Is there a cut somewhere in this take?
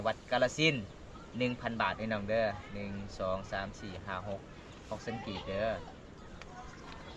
no; 0 cuts

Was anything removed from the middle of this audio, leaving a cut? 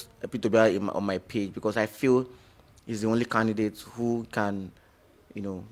no; 0 cuts

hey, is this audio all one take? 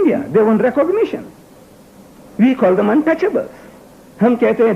no; 1 cut; at 1.0 s

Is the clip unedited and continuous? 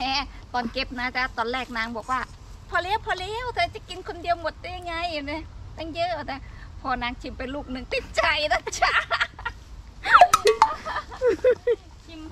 yes; 0 cuts

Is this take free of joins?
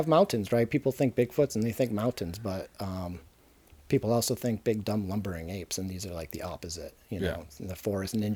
yes; 0 cuts

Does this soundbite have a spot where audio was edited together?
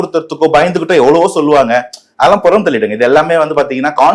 no; 0 cuts

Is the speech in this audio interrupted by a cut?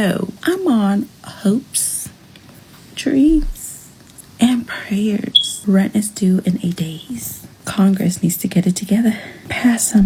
no; 0 cuts

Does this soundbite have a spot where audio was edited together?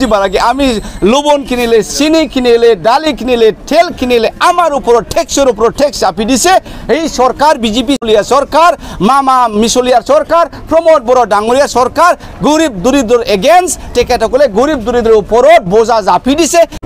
no; 0 cuts

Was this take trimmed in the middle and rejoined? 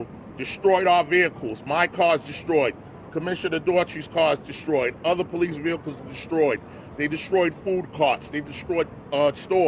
no; 0 cuts

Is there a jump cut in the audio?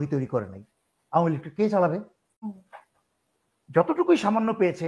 yes; 1 cut; at 2.5 s

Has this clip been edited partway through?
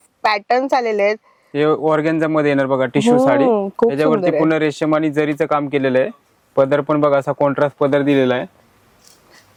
no; 0 cuts

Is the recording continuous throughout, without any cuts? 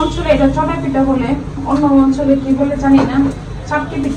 yes; 0 cuts

